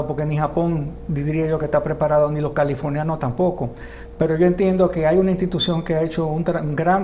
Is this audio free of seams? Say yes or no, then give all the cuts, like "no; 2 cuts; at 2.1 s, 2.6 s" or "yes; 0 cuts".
yes; 0 cuts